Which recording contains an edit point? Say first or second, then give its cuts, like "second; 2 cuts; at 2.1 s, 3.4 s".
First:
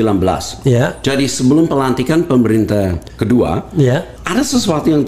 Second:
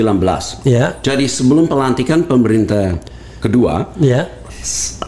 first; 2 cuts; at 3.1 s, 4.2 s